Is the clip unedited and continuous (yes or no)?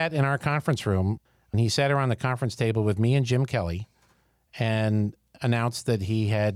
no